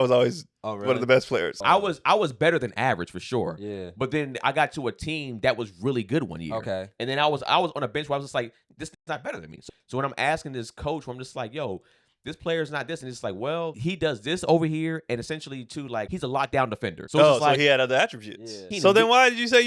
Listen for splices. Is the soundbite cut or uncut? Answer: cut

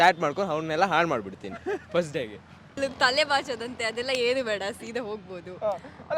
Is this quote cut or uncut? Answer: cut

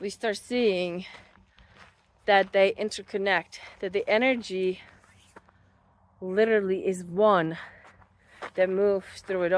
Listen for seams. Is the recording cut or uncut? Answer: uncut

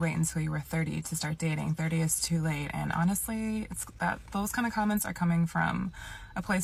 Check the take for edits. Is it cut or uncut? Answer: uncut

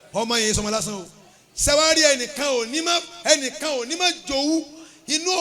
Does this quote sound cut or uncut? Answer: uncut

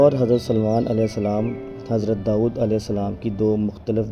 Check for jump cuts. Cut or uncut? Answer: uncut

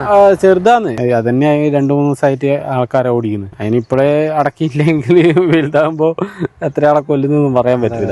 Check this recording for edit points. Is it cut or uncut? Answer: cut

